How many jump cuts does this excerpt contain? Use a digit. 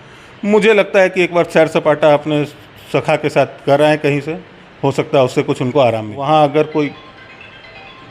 1